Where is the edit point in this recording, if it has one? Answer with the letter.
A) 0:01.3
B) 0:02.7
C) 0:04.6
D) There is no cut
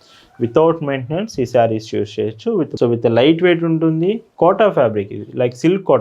B